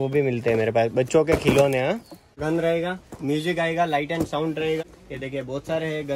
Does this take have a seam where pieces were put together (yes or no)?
yes